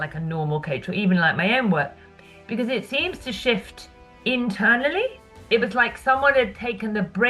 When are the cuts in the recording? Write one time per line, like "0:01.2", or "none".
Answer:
0:05.5